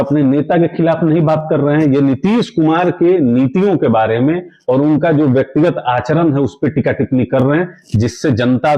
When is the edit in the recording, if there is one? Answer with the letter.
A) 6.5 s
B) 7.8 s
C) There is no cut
C